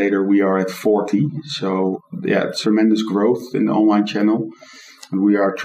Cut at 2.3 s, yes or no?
yes